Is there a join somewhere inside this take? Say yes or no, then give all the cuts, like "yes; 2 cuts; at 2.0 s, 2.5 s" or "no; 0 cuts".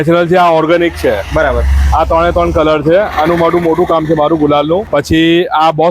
yes; 1 cut; at 4.9 s